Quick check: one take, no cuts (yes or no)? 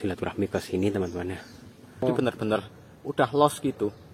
no